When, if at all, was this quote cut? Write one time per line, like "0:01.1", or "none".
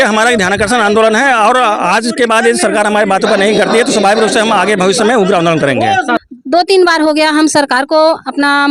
0:06.2